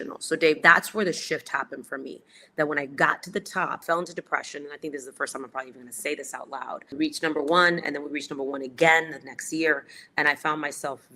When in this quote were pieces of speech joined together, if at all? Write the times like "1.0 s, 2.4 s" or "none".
3.8 s, 6.9 s